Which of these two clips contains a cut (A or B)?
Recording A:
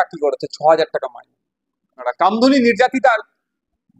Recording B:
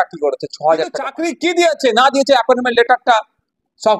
B